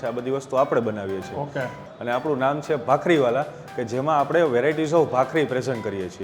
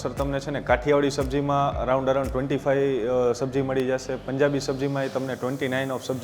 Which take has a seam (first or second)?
first